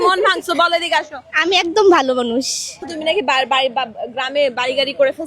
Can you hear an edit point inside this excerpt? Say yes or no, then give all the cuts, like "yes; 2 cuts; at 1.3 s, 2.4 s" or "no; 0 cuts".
yes; 1 cut; at 2.9 s